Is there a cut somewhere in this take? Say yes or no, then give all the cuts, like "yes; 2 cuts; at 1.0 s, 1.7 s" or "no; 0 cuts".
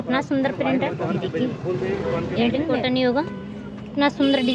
yes; 1 cut; at 2.7 s